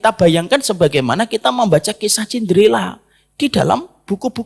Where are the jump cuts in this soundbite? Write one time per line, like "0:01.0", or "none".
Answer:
none